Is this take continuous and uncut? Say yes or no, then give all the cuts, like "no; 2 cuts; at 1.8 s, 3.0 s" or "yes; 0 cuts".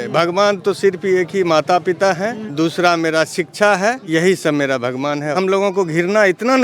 no; 1 cut; at 5.4 s